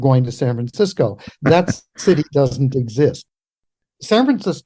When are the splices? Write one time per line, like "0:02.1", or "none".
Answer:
0:03.2